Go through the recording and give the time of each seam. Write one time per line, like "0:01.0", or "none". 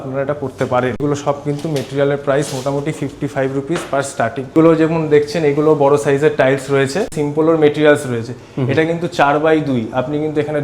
0:01.0
0:04.4
0:07.2